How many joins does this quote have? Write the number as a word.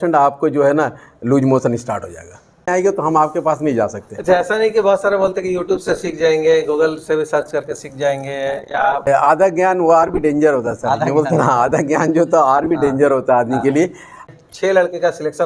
three